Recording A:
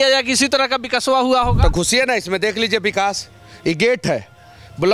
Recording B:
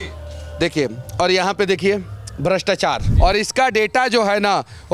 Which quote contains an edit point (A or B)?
B